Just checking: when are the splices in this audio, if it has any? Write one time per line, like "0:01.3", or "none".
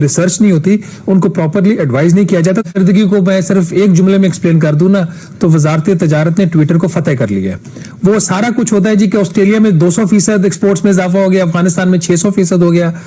0:02.7